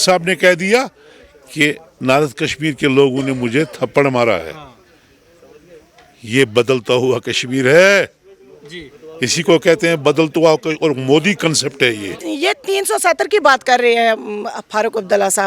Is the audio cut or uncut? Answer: cut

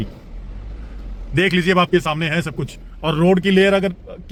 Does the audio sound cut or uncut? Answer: uncut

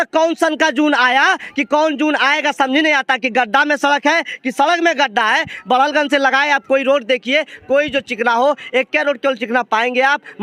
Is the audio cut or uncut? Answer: uncut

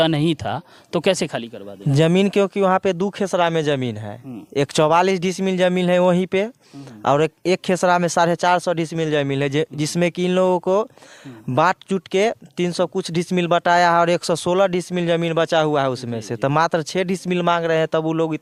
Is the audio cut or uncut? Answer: uncut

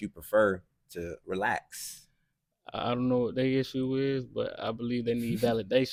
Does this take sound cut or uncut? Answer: uncut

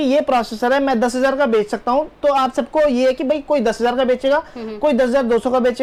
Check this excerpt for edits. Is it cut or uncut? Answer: uncut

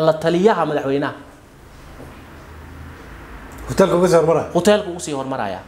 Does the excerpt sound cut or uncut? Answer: uncut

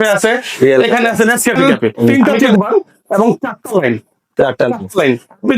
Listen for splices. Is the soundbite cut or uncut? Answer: cut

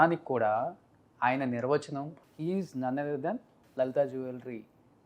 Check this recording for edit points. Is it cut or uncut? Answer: cut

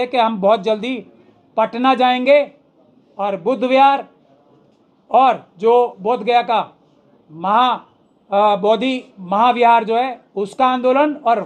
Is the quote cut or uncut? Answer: uncut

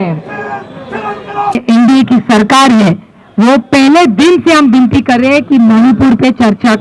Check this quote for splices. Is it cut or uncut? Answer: cut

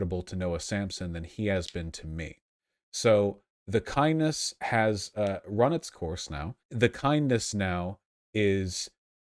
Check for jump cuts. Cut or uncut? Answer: cut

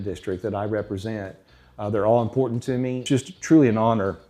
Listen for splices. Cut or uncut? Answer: cut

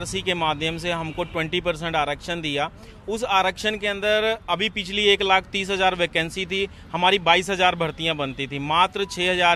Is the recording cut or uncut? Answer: uncut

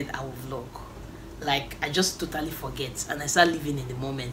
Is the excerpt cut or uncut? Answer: uncut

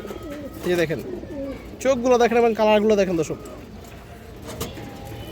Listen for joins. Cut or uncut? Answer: uncut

